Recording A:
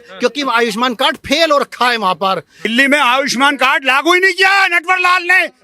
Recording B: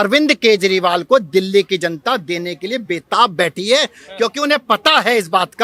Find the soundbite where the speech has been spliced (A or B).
A